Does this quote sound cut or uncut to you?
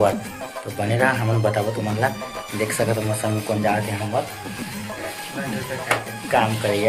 uncut